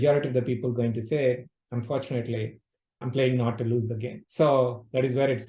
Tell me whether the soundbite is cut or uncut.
cut